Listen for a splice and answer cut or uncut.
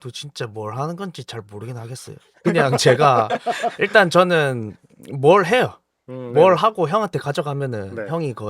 uncut